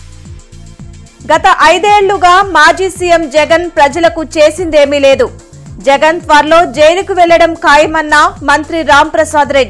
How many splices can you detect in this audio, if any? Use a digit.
1